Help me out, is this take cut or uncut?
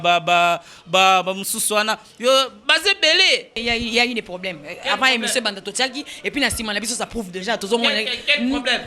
cut